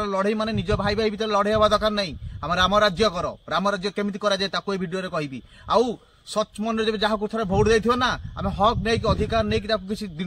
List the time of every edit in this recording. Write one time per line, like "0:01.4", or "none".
none